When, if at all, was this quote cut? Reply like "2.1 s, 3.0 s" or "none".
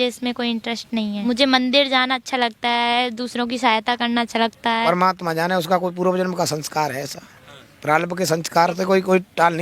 1.2 s, 4.8 s